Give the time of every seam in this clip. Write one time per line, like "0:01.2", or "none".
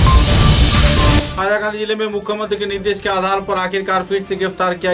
none